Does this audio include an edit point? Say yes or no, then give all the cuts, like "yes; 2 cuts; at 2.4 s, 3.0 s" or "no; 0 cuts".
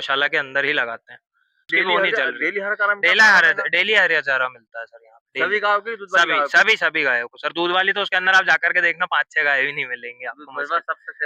yes; 1 cut; at 1.7 s